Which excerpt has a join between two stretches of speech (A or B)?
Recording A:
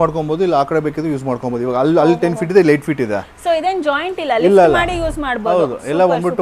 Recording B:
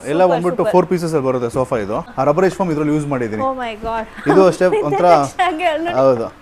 B